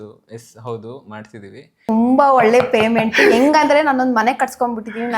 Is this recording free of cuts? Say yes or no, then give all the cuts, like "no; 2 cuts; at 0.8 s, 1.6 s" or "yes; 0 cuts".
no; 1 cut; at 1.8 s